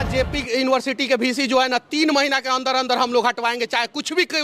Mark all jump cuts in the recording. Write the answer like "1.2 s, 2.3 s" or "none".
none